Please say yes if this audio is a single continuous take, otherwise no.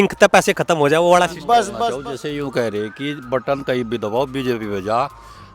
no